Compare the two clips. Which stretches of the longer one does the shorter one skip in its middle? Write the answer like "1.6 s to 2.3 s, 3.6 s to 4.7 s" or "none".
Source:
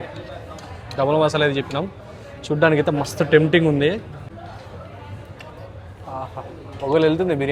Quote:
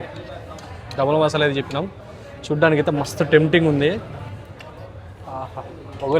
4.2 s to 5.0 s